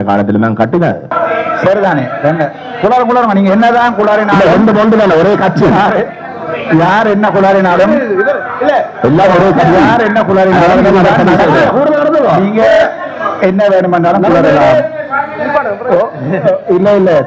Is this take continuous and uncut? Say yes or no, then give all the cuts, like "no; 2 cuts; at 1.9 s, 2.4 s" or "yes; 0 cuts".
no; 1 cut; at 1.1 s